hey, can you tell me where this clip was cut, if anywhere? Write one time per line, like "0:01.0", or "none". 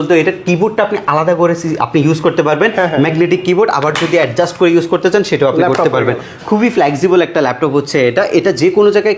none